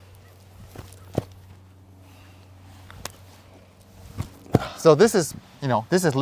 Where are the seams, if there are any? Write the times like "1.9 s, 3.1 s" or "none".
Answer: none